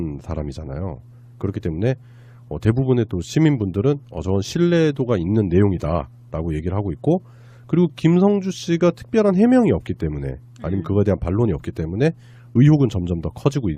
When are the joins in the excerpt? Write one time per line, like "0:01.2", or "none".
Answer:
0:12.4